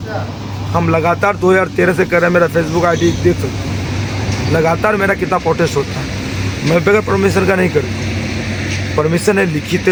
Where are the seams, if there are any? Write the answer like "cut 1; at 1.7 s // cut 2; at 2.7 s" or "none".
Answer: none